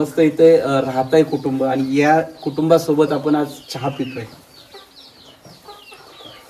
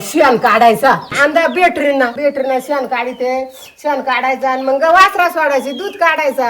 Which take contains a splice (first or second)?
second